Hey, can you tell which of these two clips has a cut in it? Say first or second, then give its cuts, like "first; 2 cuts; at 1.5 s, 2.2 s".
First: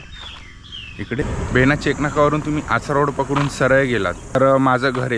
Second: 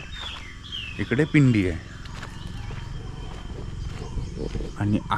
first; 2 cuts; at 1.2 s, 4.3 s